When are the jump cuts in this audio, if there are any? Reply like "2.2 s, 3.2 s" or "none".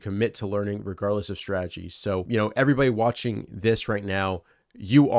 2.3 s